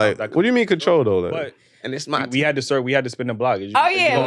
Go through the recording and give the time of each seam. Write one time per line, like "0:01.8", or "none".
0:01.7